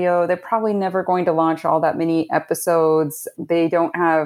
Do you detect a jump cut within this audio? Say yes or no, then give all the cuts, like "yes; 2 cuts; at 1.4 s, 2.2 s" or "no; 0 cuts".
yes; 1 cut; at 3.3 s